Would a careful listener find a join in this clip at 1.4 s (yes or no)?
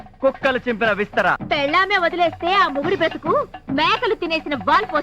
yes